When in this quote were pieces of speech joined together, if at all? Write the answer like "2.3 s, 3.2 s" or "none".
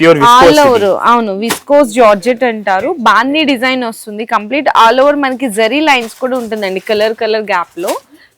none